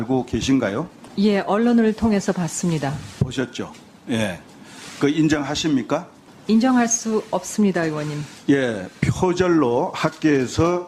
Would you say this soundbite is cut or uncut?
uncut